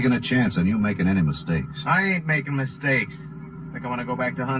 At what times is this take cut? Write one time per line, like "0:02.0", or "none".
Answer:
0:01.5